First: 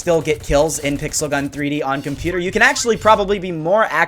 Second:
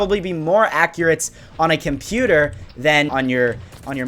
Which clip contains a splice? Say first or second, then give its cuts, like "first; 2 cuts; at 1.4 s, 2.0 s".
second; 1 cut; at 3.1 s